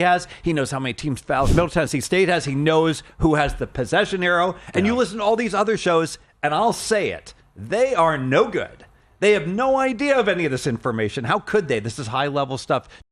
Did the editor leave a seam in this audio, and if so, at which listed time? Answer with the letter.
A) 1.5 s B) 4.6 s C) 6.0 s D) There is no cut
A